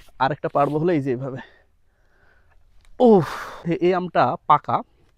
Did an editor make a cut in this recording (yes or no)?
yes